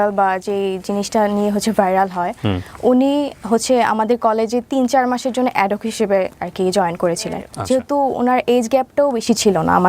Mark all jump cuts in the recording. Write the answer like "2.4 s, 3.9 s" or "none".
7.5 s